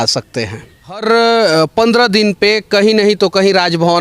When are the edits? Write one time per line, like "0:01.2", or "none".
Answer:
0:01.0